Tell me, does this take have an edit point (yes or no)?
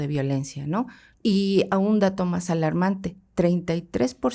yes